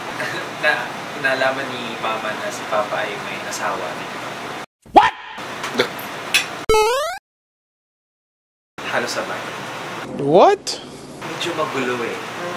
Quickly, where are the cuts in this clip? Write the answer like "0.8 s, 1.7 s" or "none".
none

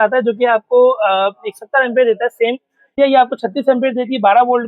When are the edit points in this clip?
3.0 s

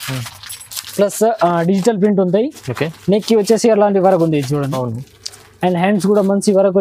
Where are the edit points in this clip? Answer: none

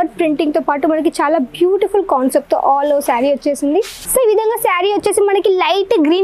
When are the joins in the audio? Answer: 4.0 s

